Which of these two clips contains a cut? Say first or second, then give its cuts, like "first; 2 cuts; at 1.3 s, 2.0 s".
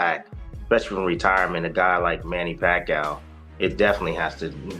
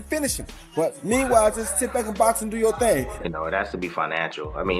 second; 1 cut; at 3.2 s